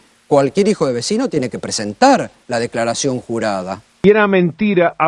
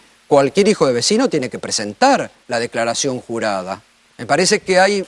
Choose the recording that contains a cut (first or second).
first